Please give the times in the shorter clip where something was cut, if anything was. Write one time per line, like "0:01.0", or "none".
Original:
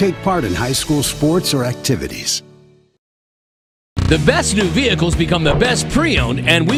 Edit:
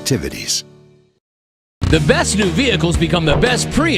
0:01.8